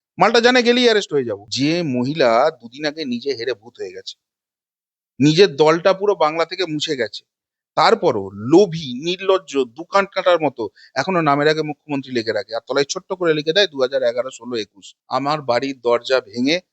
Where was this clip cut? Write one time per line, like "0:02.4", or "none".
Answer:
0:01.4
0:14.9